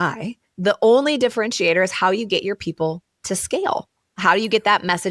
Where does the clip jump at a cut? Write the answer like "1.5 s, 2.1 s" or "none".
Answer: none